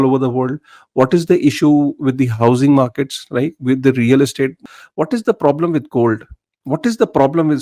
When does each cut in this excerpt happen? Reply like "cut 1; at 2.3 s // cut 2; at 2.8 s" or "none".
cut 1; at 4.6 s